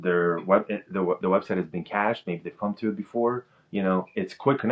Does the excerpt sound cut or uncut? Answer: uncut